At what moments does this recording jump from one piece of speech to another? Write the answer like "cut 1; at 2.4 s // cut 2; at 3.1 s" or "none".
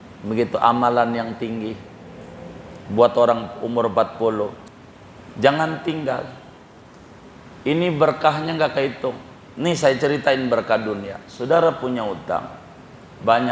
cut 1; at 4.6 s